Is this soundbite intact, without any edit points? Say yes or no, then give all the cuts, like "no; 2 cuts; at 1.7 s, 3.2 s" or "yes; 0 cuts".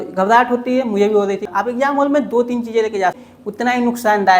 no; 2 cuts; at 1.5 s, 3.3 s